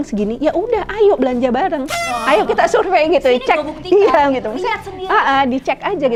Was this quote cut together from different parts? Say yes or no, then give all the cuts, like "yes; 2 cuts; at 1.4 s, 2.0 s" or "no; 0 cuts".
no; 0 cuts